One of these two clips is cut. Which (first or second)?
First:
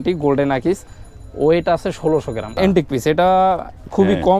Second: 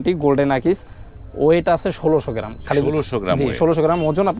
first